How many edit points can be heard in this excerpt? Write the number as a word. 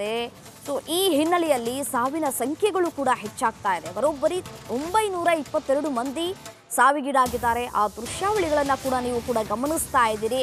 one